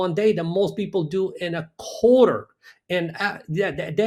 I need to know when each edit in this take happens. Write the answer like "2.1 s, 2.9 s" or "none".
none